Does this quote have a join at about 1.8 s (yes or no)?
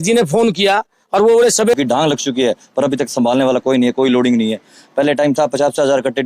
yes